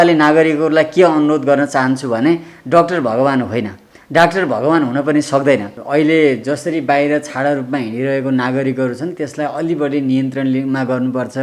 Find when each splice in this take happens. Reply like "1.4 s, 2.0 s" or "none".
5.7 s

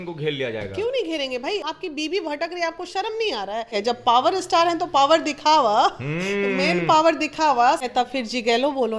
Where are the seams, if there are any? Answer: 1.6 s, 3.8 s, 7.8 s

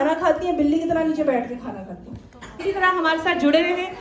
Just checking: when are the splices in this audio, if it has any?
2.6 s

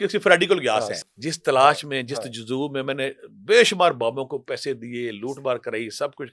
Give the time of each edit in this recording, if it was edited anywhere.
0.9 s

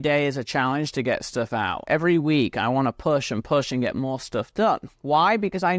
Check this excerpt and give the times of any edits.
1.8 s

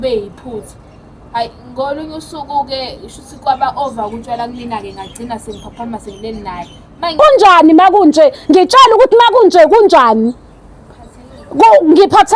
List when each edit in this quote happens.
7.0 s

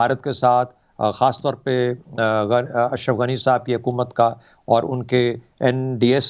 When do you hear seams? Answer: none

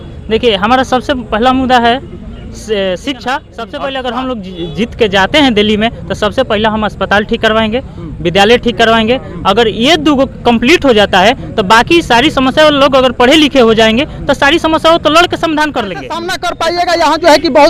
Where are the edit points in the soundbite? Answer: 3.6 s, 16.4 s

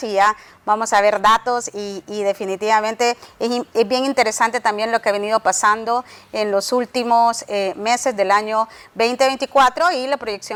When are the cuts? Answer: none

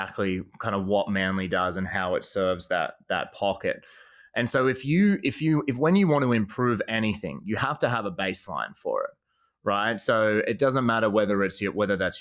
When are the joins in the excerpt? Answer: none

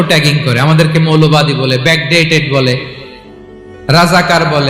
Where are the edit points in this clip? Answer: none

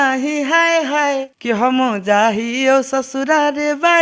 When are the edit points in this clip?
1.3 s

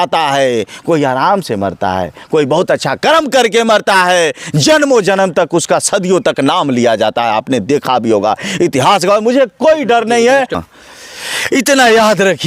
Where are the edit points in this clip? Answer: none

